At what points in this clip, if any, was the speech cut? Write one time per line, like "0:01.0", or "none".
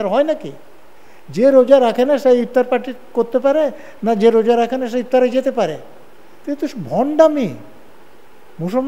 none